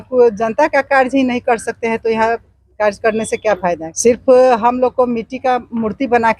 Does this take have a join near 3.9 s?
yes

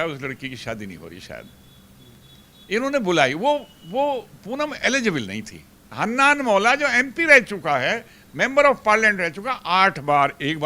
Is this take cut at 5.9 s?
yes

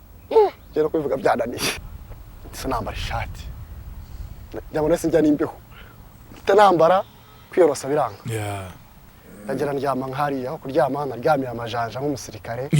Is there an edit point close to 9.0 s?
no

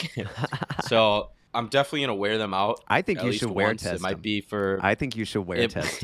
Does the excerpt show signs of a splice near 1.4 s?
yes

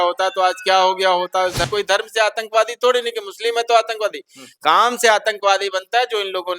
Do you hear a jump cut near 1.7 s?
yes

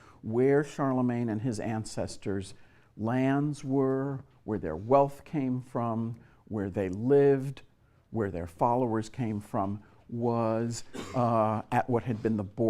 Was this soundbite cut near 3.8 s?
no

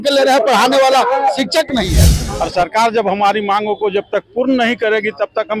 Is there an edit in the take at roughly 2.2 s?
yes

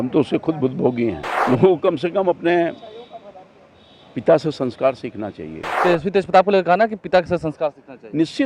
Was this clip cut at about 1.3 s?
yes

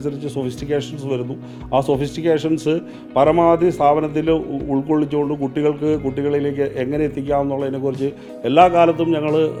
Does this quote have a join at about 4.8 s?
no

